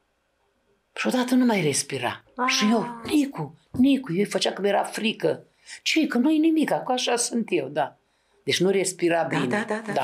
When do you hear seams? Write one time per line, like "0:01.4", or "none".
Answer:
none